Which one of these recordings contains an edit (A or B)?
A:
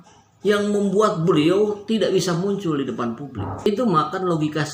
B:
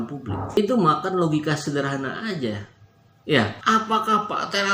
B